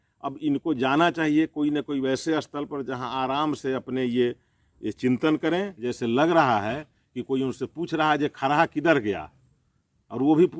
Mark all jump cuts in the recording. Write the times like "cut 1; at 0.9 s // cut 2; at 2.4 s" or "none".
cut 1; at 5.8 s